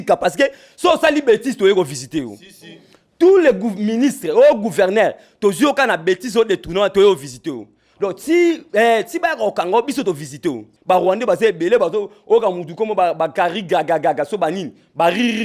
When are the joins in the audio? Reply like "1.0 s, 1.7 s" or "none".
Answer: 10.7 s